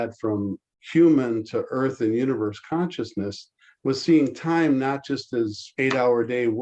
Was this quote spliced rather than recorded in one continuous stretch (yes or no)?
yes